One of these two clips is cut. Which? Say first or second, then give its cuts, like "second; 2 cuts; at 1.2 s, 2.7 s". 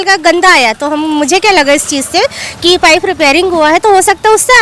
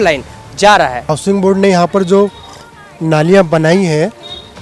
second; 1 cut; at 1.1 s